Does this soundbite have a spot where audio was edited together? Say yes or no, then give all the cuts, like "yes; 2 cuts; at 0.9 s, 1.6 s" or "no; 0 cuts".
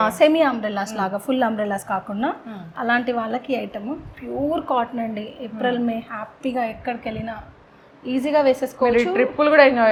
no; 0 cuts